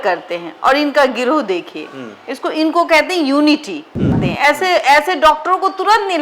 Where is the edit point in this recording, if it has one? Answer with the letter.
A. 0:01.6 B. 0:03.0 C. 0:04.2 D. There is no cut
C